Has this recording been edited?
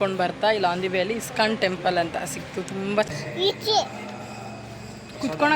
yes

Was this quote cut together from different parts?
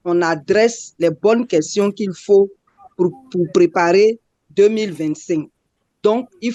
no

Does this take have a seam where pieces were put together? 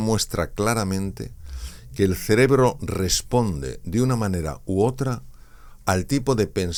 no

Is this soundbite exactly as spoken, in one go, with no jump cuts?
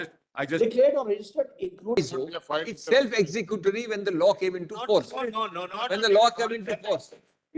no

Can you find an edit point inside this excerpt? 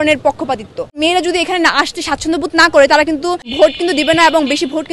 yes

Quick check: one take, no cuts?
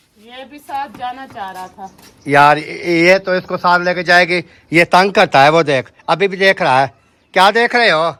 yes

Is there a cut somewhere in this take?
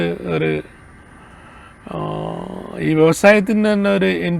no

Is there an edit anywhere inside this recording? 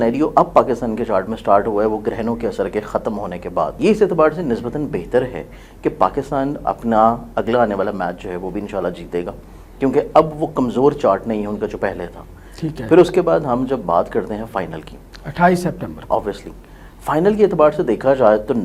yes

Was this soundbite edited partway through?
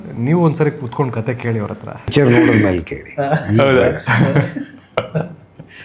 yes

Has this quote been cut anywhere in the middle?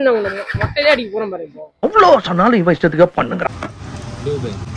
yes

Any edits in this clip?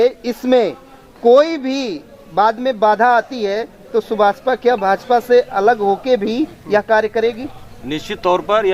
no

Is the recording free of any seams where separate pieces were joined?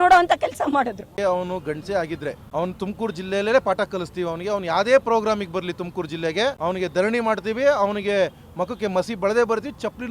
no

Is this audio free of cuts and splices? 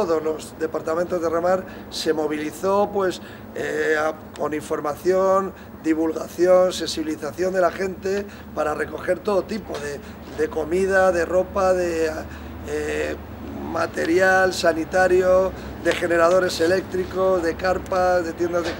yes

